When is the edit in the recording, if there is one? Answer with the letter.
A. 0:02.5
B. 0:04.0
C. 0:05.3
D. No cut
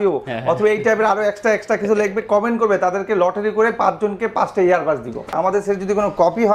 C